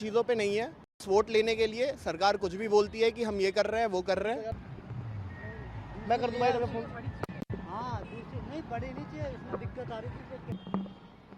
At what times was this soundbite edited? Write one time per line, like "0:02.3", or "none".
0:01.0
0:04.6